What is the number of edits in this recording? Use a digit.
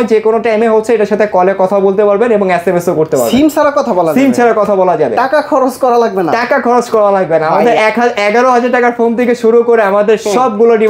0